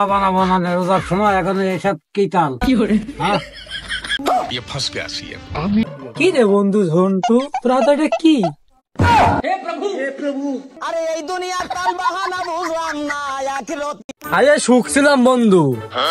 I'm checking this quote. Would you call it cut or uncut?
cut